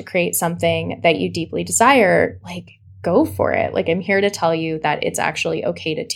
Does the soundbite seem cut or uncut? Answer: uncut